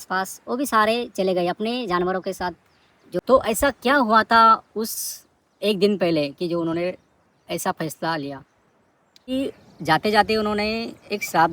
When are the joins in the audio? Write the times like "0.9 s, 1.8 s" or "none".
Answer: 3.2 s, 9.3 s